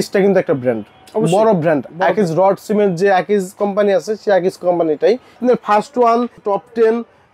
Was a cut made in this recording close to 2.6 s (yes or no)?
no